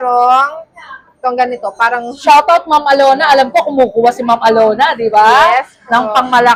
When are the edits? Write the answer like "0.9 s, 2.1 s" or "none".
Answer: none